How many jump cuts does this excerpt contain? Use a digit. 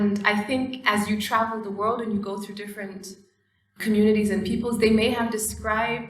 1